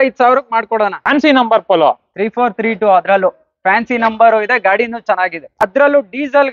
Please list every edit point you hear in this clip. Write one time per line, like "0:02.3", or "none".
0:01.0
0:05.5